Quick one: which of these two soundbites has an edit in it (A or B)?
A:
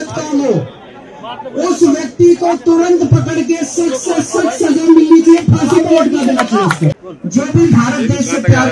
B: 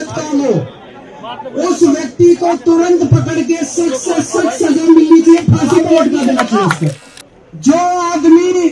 B